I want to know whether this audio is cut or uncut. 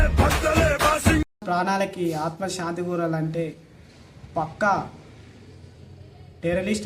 cut